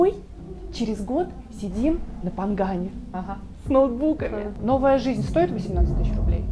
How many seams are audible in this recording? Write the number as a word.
one